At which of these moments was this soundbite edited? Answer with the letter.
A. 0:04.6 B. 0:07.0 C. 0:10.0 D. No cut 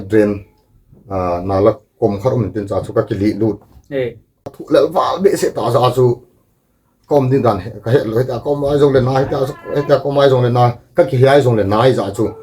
A